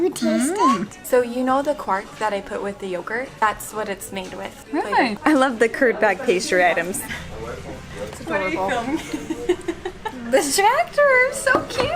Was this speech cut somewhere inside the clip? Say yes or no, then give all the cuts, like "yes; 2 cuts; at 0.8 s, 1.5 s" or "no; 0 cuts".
yes; 3 cuts; at 0.9 s, 3.4 s, 5.1 s